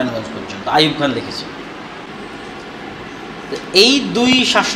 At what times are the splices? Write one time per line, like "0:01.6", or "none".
0:02.1

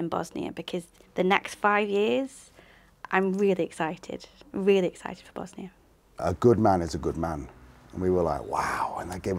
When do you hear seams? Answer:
0:06.2

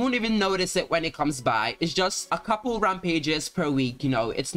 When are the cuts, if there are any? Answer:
none

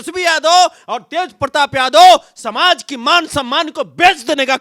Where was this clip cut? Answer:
none

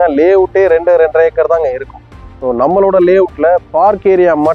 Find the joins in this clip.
none

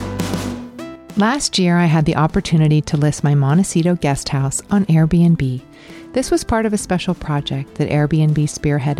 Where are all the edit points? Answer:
0:01.0

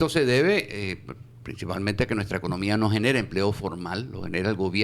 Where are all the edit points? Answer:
none

